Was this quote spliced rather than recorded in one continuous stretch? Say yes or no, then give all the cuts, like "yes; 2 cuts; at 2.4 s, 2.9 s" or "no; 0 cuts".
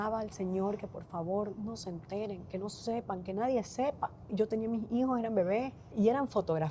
yes; 2 cuts; at 4.3 s, 5.9 s